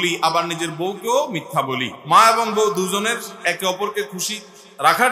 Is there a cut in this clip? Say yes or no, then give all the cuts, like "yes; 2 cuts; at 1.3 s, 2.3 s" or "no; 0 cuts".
yes; 1 cut; at 2.0 s